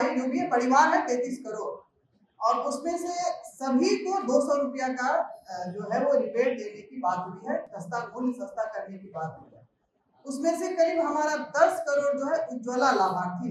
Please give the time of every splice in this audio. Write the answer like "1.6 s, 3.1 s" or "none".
none